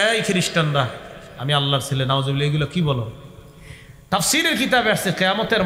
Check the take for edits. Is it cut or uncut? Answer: uncut